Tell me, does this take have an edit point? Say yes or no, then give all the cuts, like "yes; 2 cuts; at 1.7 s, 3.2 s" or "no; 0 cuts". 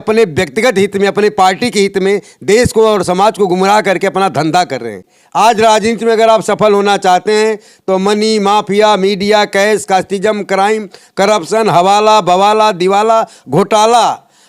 yes; 1 cut; at 5.1 s